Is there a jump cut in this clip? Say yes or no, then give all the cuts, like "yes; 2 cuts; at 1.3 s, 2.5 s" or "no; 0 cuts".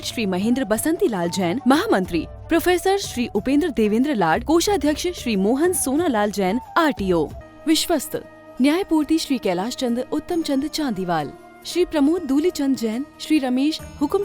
yes; 1 cut; at 7.4 s